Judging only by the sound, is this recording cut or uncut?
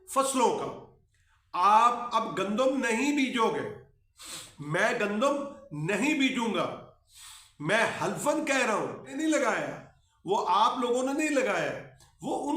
cut